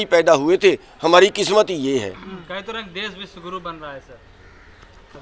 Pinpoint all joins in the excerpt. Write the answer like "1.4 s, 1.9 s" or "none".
none